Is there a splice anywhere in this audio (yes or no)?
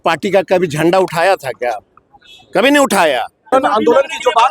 yes